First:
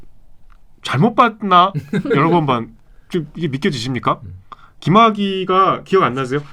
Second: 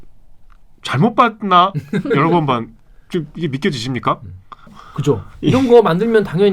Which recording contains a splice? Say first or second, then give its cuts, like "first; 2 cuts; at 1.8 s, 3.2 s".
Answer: second; 1 cut; at 4.7 s